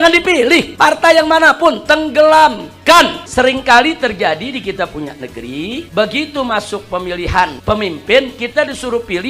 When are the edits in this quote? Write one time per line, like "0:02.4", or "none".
0:03.2
0:05.9